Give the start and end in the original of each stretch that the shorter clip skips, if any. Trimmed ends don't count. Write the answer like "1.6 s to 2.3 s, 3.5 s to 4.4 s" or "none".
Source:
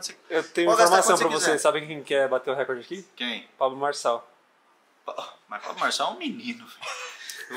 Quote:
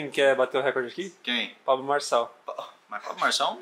4.3 s to 5.0 s